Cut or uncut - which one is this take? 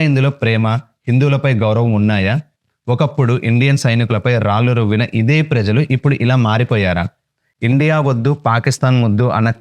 cut